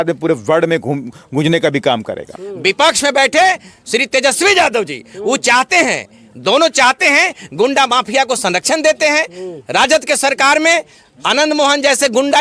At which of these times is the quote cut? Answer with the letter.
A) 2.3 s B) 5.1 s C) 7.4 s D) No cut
A